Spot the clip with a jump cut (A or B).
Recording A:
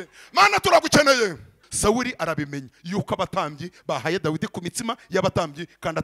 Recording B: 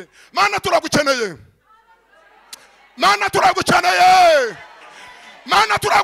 A